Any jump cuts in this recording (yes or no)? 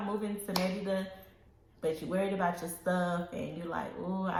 no